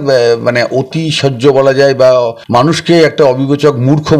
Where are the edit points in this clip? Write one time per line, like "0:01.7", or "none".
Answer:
0:02.4